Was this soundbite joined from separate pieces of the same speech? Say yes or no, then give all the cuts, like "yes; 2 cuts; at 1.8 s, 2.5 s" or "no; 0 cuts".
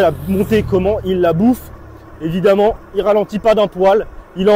no; 0 cuts